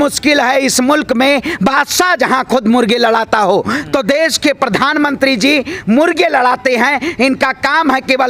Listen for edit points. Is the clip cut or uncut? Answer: uncut